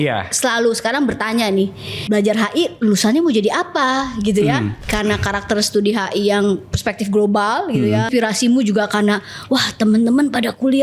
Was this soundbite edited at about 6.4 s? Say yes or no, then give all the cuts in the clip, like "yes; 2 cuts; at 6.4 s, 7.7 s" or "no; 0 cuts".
no; 3 cuts; at 1.9 s, 4.8 s, 8.1 s